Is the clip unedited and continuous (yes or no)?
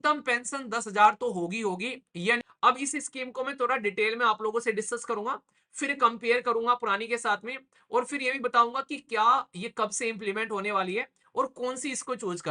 no